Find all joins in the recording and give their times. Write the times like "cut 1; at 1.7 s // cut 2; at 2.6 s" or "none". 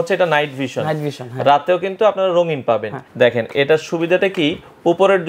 cut 1; at 3.0 s

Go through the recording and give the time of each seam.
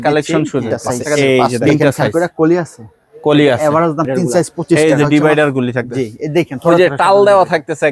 cut 1; at 1.6 s // cut 2; at 4.8 s

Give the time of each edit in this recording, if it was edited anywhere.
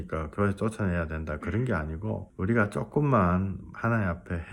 cut 1; at 2.3 s // cut 2; at 3.7 s

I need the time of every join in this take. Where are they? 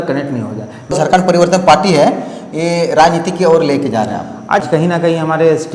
cut 1; at 0.9 s // cut 2; at 4.6 s

